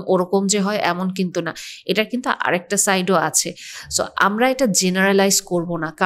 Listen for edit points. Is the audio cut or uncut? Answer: uncut